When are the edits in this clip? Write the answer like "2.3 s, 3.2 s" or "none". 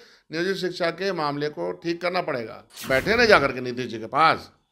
2.7 s